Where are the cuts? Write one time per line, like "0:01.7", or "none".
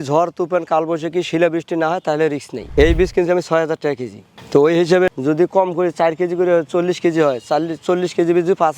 0:02.6
0:05.1